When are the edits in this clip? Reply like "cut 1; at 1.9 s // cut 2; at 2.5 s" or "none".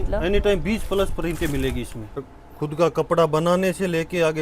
cut 1; at 2.2 s